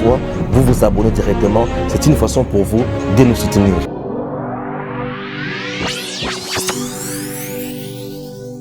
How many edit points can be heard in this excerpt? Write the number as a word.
one